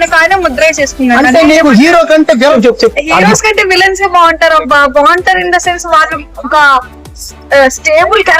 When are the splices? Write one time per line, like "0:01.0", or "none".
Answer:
0:02.5